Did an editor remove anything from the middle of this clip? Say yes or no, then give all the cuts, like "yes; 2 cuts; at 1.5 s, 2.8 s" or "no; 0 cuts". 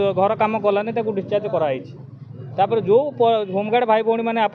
no; 0 cuts